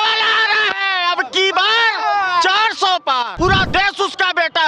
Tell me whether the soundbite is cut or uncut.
cut